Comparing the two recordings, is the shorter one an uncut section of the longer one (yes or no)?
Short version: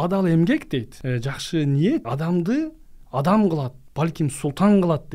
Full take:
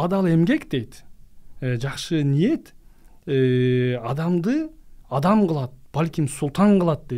no